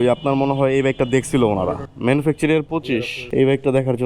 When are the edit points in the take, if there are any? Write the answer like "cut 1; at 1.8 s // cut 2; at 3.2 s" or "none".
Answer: cut 1; at 1.8 s // cut 2; at 3.2 s